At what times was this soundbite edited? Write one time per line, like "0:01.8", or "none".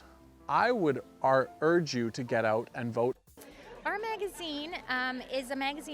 0:03.2